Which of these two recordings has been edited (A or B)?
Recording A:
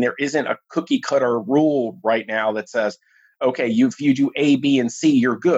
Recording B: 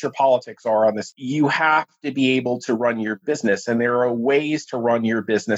B